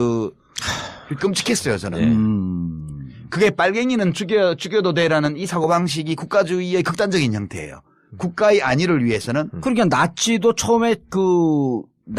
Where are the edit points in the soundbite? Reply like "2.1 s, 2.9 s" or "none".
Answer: none